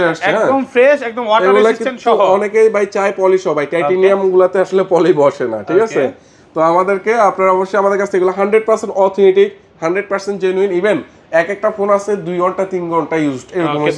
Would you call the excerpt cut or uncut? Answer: uncut